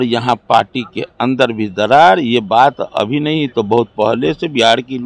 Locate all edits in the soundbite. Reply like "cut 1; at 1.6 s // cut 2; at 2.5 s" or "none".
none